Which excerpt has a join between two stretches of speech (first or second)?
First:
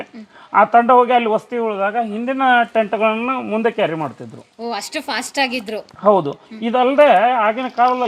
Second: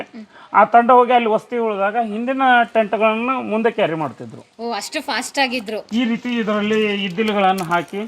second